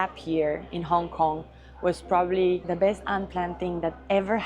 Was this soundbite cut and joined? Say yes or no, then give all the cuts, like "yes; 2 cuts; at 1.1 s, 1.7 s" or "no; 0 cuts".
yes; 1 cut; at 2.6 s